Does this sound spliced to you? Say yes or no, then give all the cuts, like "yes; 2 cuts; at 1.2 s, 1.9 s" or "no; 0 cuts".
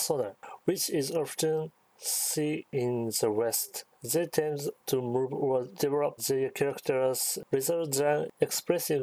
yes; 4 cuts; at 2.7 s, 3.7 s, 4.8 s, 5.9 s